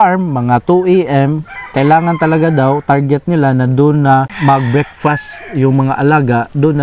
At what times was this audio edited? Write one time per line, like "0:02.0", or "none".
0:04.3